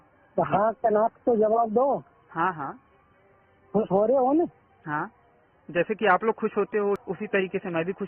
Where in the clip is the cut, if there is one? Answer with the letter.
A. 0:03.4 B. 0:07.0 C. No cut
B